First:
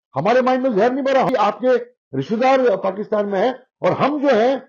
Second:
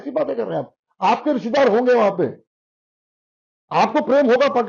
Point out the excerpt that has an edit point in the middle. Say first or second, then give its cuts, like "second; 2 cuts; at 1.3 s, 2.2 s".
first; 1 cut; at 1.3 s